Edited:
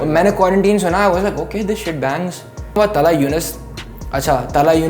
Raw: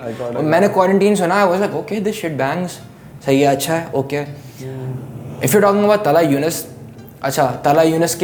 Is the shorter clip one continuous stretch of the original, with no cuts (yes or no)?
no